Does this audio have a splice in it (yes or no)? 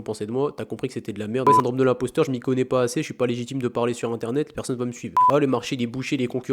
yes